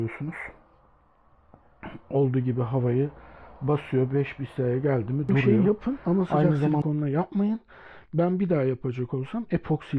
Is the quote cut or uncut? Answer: cut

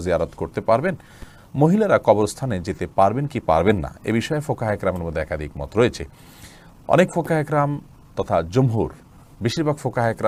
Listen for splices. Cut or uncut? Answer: uncut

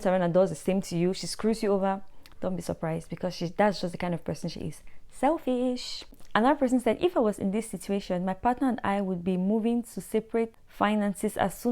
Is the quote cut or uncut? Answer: cut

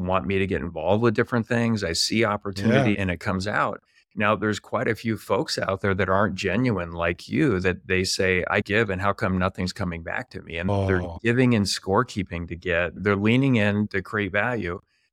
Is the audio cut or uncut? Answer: cut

